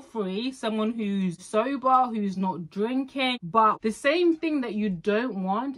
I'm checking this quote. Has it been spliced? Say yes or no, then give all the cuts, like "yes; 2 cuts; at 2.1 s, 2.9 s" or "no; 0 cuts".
yes; 2 cuts; at 1.4 s, 3.6 s